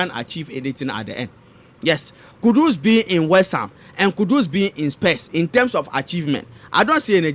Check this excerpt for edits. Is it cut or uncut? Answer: uncut